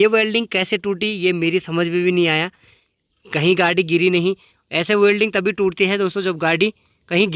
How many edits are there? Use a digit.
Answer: 0